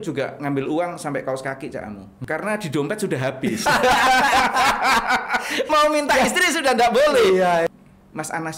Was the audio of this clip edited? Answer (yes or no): yes